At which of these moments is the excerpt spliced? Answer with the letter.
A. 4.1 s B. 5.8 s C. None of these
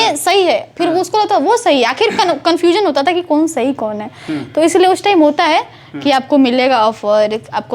C